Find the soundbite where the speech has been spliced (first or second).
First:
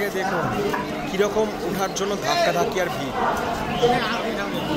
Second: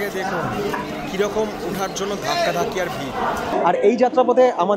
second